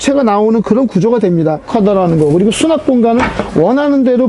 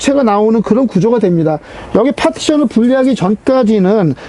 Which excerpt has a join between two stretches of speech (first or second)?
first